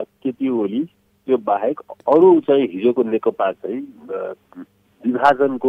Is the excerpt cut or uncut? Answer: uncut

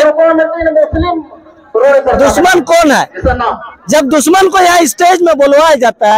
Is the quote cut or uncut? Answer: uncut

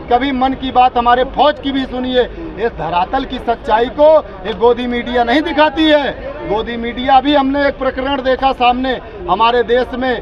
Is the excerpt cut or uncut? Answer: uncut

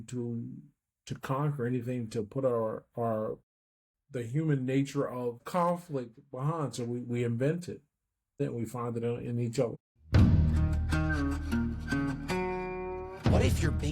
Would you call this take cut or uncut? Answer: cut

